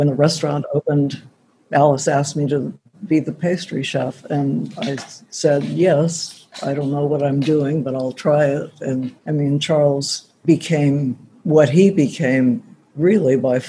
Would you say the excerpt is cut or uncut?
uncut